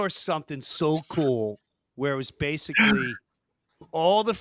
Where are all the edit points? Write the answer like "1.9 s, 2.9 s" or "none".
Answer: none